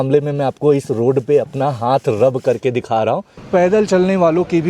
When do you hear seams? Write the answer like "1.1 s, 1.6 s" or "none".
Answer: 3.3 s